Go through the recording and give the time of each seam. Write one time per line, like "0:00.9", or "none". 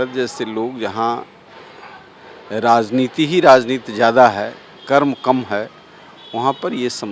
none